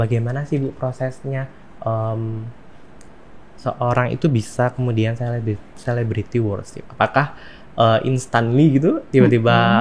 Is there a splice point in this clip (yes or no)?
no